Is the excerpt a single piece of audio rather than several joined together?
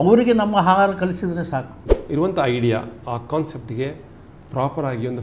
no; 1 cut; at 2.0 s

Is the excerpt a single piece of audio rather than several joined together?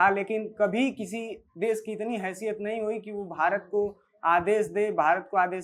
yes; 0 cuts

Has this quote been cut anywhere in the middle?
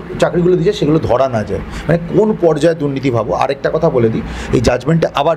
no; 0 cuts

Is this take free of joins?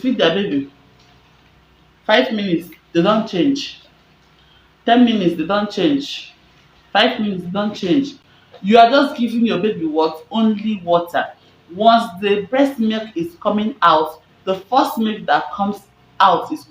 yes; 0 cuts

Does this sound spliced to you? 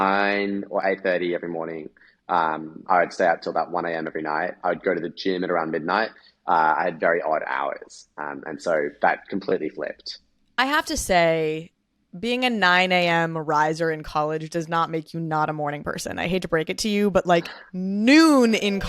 no; 0 cuts

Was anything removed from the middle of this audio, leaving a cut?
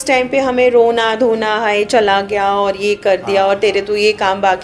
no; 0 cuts

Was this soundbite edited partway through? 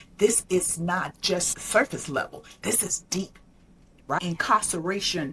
yes; 2 cuts; at 1.5 s, 4.2 s

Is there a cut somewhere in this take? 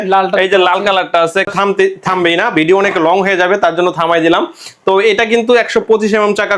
yes; 1 cut; at 1.5 s

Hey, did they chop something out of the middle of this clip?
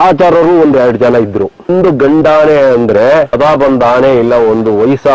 yes; 2 cuts; at 1.7 s, 3.3 s

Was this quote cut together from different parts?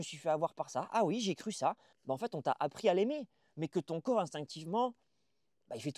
yes; 1 cut; at 1.9 s

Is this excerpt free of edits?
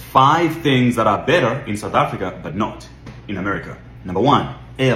yes; 0 cuts

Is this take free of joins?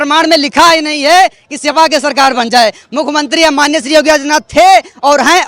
yes; 0 cuts

